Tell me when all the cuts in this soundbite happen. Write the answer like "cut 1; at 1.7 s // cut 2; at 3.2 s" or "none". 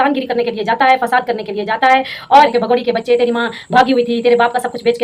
cut 1; at 2.5 s